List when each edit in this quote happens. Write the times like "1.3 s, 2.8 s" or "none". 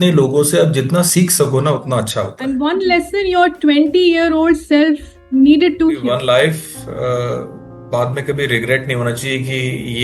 2.3 s, 6.0 s

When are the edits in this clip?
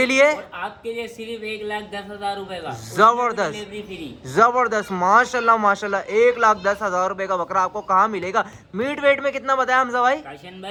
none

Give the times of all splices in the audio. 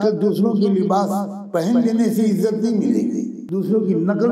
3.3 s

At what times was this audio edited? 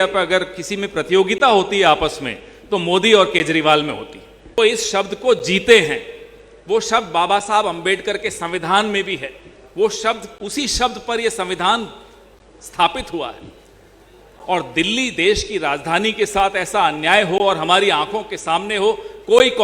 4.6 s

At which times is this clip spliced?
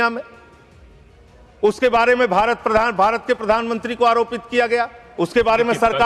none

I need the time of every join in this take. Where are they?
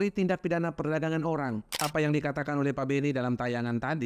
1.8 s

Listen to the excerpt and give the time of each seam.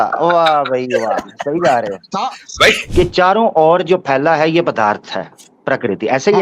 2.8 s

